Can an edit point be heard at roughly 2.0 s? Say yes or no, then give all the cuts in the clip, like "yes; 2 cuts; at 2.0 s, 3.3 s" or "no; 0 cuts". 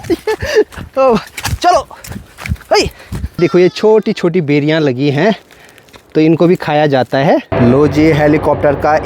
no; 2 cuts; at 3.4 s, 7.5 s